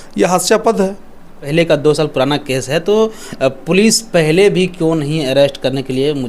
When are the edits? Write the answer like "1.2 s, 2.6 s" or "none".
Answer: 1.4 s